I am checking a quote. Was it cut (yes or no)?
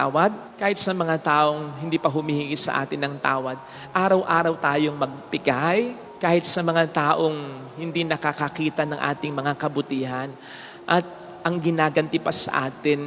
no